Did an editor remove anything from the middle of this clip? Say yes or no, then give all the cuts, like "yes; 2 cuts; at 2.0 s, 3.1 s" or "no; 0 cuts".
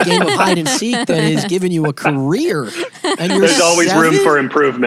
no; 0 cuts